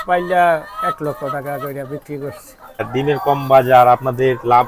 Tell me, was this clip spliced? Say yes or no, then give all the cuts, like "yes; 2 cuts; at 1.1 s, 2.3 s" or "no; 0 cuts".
yes; 1 cut; at 2.8 s